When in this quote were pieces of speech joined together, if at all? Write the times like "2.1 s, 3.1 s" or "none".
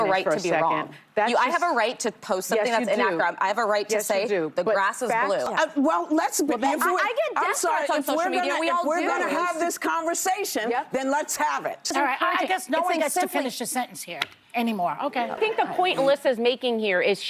5.5 s, 11.9 s, 15.4 s